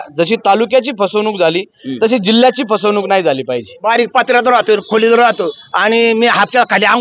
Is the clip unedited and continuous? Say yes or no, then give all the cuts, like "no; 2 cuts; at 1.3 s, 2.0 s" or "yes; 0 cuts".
no; 2 cuts; at 3.8 s, 5.6 s